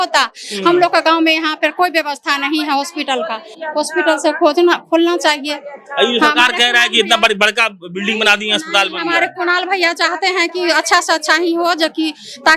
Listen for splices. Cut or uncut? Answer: uncut